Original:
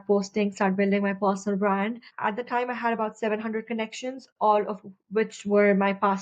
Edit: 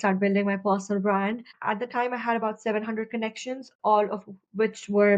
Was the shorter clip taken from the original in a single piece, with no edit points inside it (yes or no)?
yes